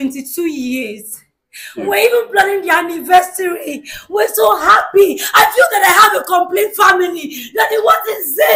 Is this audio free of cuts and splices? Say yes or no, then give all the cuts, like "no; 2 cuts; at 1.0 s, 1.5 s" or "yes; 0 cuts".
yes; 0 cuts